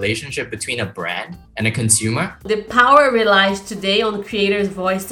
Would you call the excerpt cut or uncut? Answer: cut